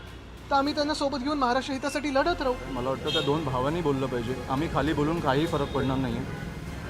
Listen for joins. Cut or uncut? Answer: cut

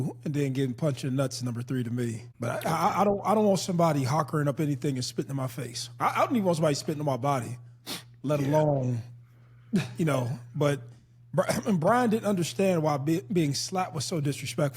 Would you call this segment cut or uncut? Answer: cut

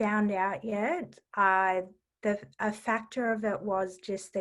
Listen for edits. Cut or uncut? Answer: uncut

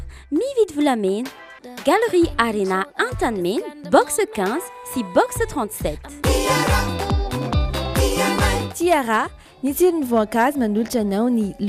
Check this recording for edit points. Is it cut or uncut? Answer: uncut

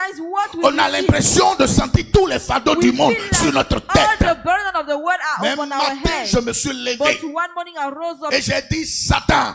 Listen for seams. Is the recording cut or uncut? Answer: uncut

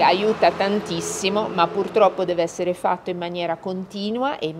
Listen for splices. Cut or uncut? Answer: uncut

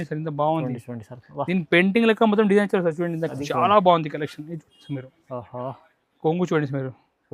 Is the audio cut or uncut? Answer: cut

